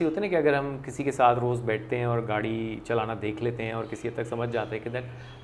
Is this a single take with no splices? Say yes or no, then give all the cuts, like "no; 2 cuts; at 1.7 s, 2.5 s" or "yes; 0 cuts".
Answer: yes; 0 cuts